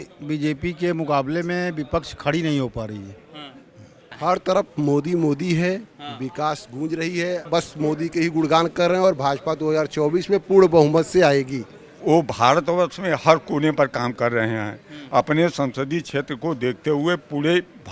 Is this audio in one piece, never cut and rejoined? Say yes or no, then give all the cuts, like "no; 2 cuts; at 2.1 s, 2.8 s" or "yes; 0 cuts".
no; 3 cuts; at 4.1 s, 7.4 s, 12.0 s